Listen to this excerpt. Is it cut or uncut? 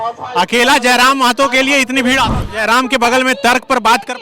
cut